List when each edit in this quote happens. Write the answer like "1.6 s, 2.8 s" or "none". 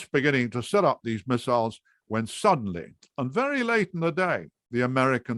none

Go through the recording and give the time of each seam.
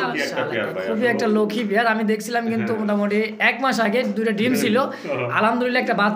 none

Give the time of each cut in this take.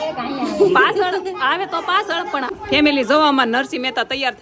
2.5 s

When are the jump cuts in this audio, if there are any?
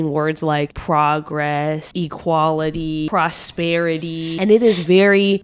1.9 s, 3.1 s, 4.3 s

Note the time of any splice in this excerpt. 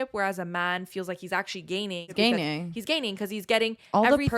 2.1 s

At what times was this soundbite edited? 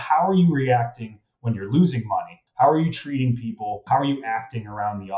2.4 s, 3.8 s

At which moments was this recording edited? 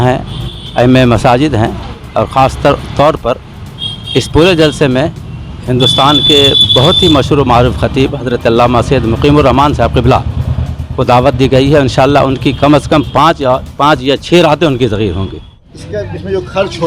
15.7 s

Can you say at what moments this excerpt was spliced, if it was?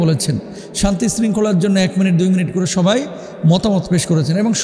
none

